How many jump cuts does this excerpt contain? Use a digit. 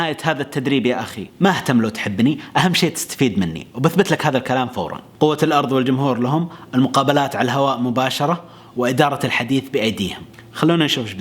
2